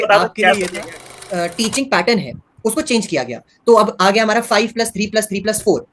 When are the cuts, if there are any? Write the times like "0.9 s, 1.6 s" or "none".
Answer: 1.2 s